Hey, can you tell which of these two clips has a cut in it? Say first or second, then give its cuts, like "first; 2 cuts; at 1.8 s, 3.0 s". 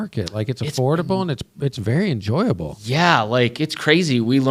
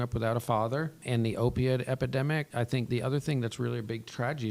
second; 2 cuts; at 1.0 s, 2.7 s